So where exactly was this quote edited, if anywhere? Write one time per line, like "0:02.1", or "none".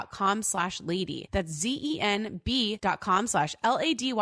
0:01.2
0:02.8